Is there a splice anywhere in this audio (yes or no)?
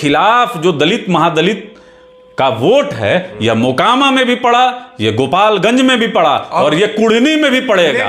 no